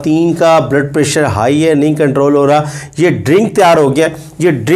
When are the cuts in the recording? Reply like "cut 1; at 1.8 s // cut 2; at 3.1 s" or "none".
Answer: none